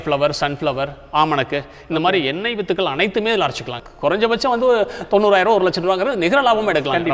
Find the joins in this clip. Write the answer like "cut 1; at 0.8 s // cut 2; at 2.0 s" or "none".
cut 1; at 3.7 s